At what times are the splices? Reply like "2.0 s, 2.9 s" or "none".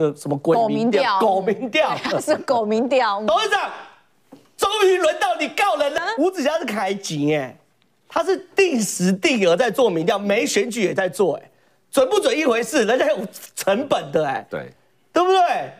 6.0 s